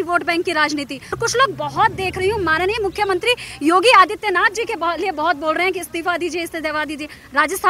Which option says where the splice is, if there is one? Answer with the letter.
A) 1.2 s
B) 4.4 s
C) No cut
A